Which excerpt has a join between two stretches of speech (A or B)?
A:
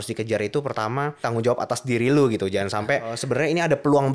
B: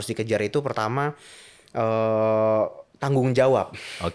A